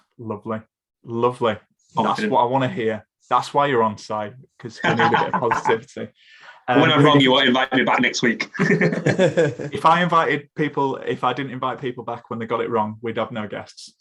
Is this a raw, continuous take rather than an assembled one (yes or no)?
yes